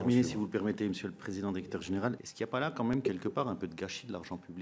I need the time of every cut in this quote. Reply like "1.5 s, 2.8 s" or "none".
2.2 s